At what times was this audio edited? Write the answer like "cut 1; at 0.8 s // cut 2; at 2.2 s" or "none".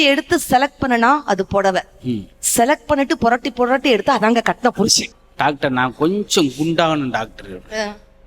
cut 1; at 5.2 s